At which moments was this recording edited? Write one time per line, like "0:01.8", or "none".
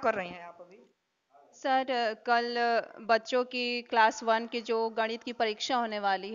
none